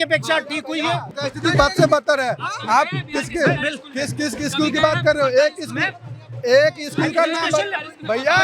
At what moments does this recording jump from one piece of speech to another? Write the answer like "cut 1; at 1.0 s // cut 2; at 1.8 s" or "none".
cut 1; at 1.1 s